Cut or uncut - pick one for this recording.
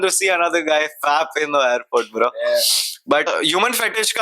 cut